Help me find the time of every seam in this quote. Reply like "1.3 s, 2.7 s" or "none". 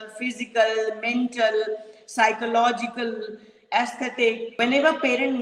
4.5 s